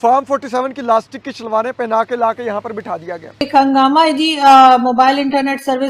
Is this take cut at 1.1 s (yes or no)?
no